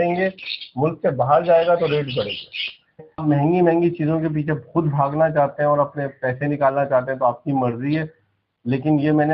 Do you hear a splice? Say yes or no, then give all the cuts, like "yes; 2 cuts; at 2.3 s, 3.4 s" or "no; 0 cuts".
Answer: yes; 1 cut; at 3.1 s